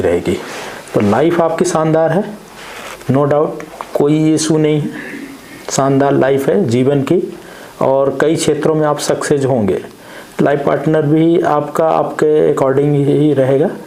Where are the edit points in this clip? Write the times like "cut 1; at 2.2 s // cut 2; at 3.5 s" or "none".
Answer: none

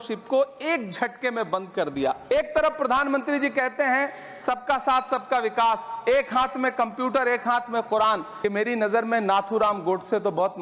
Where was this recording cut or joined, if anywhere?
cut 1; at 2.2 s // cut 2; at 8.3 s

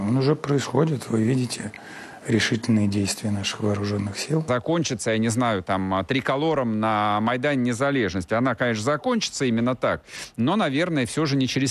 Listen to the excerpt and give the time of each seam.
cut 1; at 4.5 s

